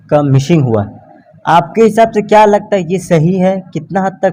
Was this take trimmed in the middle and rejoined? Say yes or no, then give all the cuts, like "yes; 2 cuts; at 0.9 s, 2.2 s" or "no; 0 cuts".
no; 0 cuts